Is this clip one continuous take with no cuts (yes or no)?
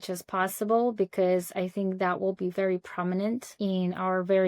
no